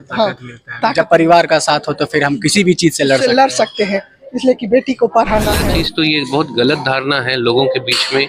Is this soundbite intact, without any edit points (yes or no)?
no